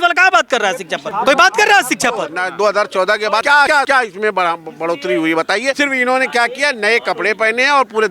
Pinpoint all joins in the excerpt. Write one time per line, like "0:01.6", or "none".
0:01.0
0:02.4
0:03.7
0:05.8